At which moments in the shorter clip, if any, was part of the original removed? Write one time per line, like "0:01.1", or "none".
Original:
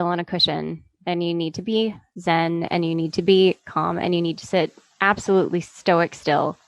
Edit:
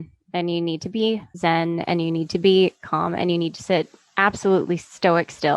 0:01.3